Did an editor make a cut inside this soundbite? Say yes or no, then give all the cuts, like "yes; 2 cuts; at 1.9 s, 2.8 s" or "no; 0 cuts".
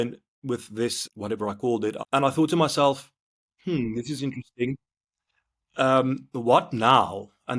yes; 2 cuts; at 1.0 s, 2.0 s